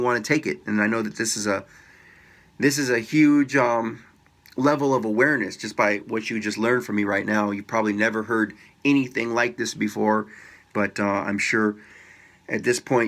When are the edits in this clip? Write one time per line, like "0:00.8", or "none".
none